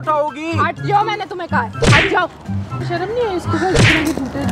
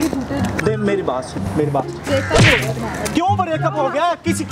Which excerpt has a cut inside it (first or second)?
first